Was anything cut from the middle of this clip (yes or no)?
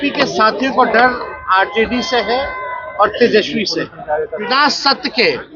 yes